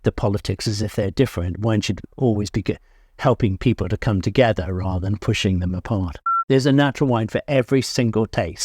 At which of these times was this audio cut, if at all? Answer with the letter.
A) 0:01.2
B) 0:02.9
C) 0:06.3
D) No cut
C